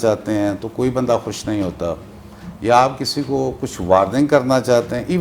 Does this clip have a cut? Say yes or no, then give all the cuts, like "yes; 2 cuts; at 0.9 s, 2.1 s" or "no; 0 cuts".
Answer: no; 0 cuts